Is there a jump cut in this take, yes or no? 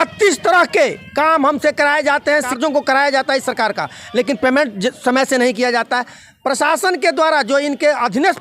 yes